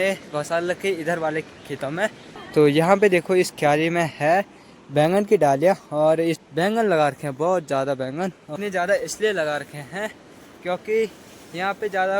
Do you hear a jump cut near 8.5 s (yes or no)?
yes